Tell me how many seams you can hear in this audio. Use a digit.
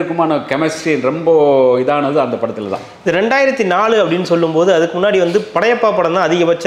0